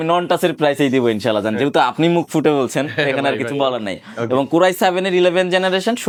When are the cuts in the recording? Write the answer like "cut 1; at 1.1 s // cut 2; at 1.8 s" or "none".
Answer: none